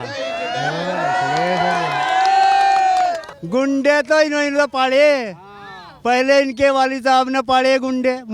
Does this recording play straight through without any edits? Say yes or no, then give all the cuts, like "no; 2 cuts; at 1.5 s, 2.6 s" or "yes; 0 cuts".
no; 1 cut; at 3.3 s